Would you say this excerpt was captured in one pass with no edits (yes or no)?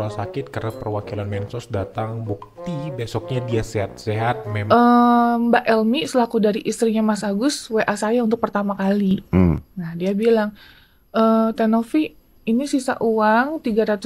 no